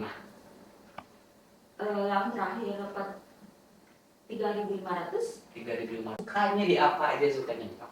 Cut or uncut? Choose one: cut